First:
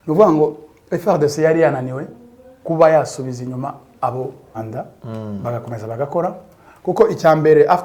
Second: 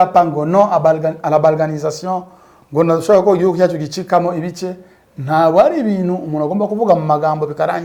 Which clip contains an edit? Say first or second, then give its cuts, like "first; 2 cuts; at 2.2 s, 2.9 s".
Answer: first; 1 cut; at 4.6 s